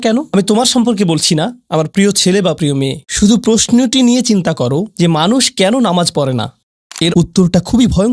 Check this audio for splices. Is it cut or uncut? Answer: cut